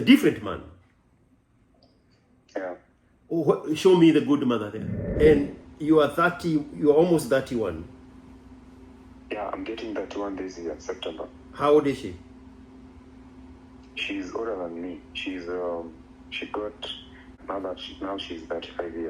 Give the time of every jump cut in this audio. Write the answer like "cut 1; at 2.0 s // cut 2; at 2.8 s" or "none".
cut 1; at 5.1 s // cut 2; at 17.4 s